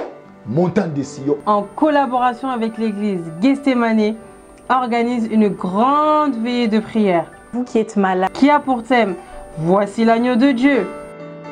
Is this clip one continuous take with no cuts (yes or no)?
no